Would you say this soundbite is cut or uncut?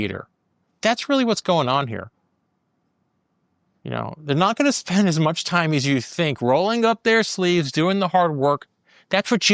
uncut